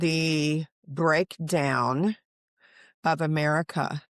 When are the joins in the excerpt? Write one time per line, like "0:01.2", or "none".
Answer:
none